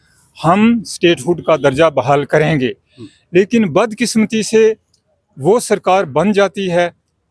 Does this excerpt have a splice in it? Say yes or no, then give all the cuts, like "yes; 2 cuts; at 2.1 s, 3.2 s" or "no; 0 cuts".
no; 0 cuts